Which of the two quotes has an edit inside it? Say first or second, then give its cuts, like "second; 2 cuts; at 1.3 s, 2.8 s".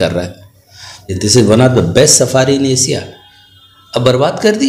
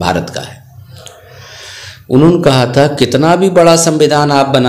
first; 1 cut; at 1.1 s